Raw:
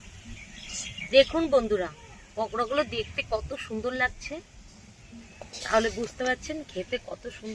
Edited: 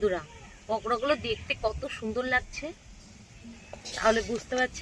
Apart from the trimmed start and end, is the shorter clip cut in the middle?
no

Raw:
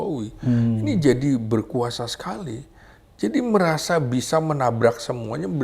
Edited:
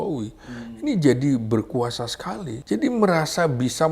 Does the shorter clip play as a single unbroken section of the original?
no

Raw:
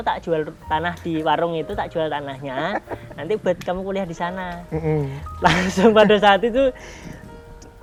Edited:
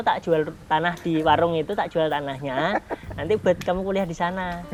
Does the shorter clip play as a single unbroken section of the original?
yes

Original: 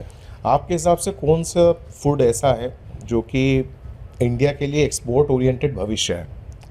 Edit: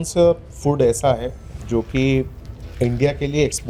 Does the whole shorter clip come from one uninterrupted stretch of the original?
yes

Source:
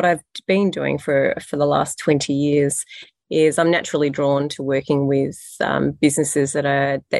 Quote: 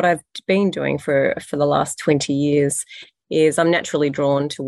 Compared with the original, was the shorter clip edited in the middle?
no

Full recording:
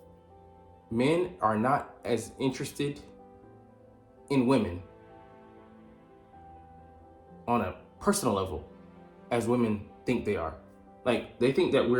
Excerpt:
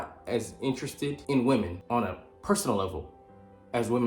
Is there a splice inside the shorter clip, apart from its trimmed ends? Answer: yes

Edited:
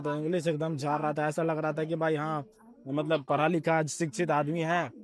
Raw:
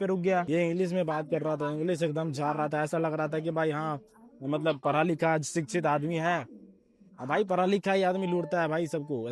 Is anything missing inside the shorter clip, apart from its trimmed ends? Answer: no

